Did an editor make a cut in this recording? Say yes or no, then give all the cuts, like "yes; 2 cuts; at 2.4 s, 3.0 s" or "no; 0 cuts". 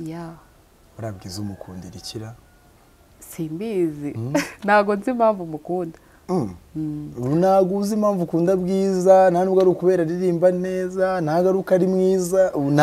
no; 0 cuts